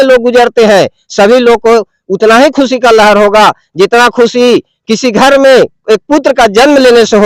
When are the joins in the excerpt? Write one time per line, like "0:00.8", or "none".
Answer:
none